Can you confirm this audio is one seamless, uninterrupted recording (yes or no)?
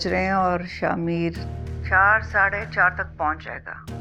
yes